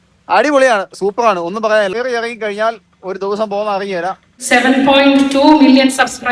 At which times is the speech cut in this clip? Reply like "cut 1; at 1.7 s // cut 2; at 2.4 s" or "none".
cut 1; at 1.9 s // cut 2; at 4.3 s